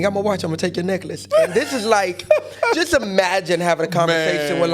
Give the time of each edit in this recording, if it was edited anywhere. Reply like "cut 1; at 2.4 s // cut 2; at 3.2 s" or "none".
none